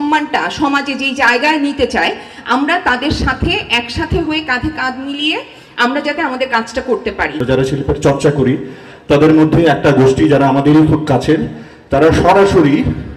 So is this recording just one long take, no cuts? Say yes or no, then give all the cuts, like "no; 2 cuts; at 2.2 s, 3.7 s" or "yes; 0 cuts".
no; 1 cut; at 7.4 s